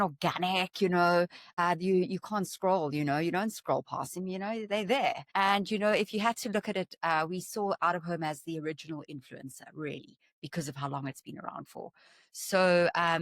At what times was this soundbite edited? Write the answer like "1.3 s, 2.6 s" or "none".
1.6 s, 5.2 s

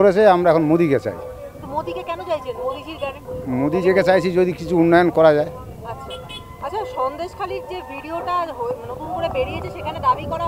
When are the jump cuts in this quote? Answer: none

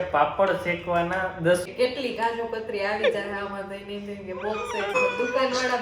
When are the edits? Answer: 1.7 s, 4.9 s

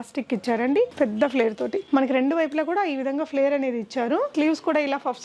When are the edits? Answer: 0.9 s, 4.3 s

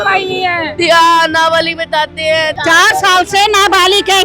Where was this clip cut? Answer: 2.5 s

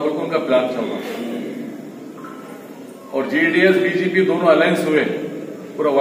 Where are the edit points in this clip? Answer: none

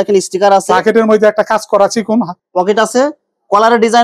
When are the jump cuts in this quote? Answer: 2.4 s

